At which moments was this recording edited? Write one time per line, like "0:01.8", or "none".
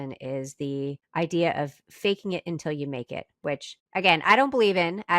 0:01.0
0:03.8

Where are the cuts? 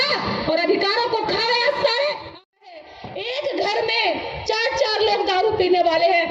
0:02.4

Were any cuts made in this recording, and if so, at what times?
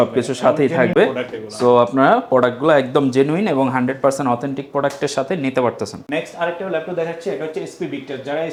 none

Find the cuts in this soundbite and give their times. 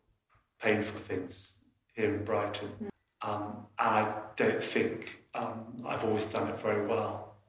0:02.9

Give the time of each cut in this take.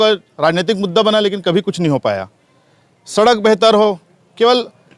none

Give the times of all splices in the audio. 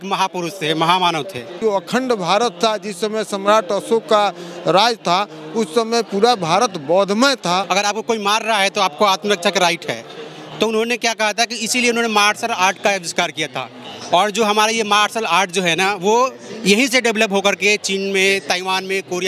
0:01.5
0:07.7

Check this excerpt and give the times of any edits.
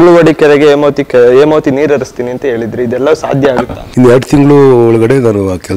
0:03.8

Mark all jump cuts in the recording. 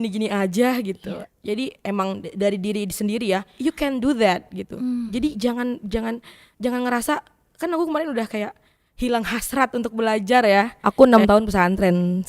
0:03.5
0:10.8

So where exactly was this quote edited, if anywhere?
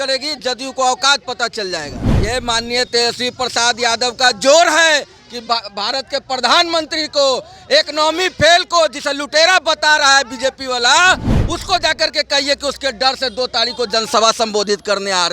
0:02.0

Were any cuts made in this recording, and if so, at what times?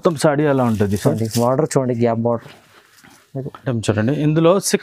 0:03.6

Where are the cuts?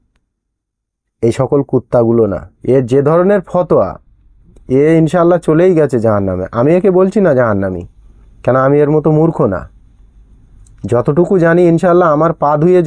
0:02.5

